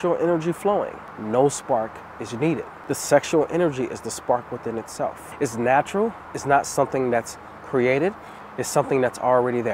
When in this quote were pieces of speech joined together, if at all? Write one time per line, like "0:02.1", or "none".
0:01.1
0:02.7
0:05.2